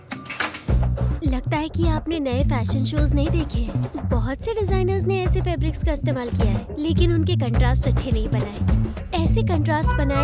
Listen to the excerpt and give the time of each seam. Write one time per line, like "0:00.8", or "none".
none